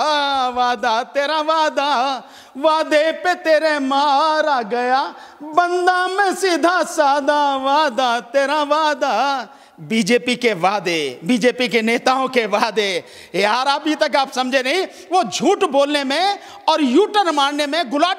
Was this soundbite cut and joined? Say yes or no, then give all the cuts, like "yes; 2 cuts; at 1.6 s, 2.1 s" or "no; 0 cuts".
no; 0 cuts